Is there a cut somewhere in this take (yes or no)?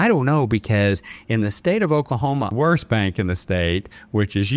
yes